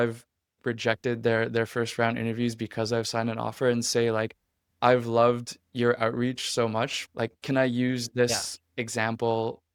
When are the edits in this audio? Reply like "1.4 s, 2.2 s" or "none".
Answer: none